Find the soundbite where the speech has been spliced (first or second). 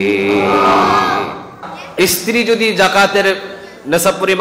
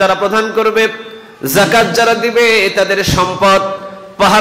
first